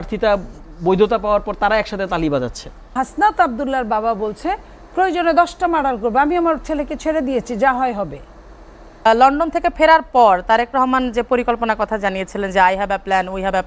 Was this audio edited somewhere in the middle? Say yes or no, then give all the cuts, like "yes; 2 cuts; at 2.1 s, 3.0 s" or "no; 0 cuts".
yes; 2 cuts; at 2.9 s, 9.1 s